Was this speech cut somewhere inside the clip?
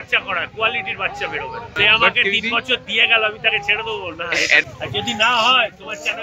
yes; 2 cuts; at 1.7 s, 4.6 s

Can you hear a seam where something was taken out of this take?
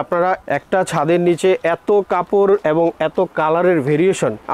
no; 0 cuts

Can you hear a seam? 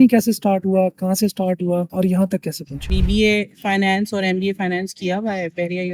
yes; 1 cut; at 3.0 s

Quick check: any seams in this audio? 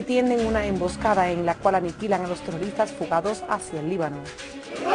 no; 0 cuts

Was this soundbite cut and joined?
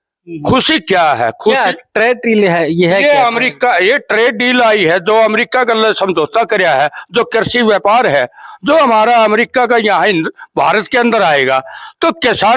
no; 0 cuts

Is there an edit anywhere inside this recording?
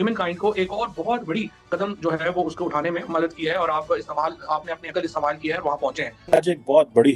yes; 1 cut; at 6.1 s

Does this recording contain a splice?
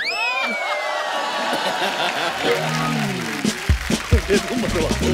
no; 0 cuts

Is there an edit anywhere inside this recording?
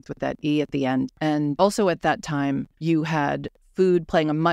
yes; 3 cuts; at 1.3 s, 2.7 s, 3.6 s

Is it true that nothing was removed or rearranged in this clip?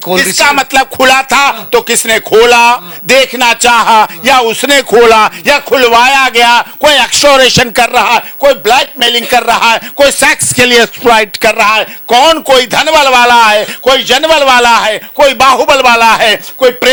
yes; 0 cuts

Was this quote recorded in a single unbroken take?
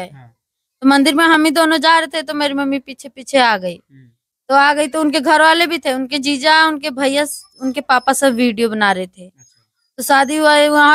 yes; 0 cuts

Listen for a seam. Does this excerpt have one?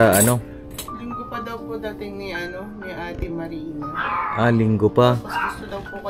no; 0 cuts

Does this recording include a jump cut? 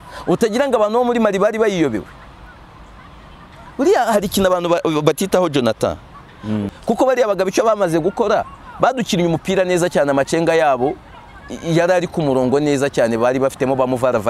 yes; 1 cut; at 6.7 s

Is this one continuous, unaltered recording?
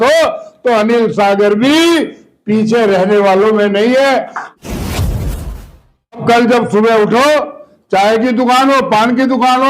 no; 2 cuts; at 4.4 s, 6.2 s

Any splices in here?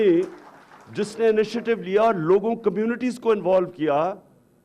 no; 0 cuts

